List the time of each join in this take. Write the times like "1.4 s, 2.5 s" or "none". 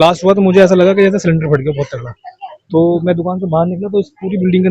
none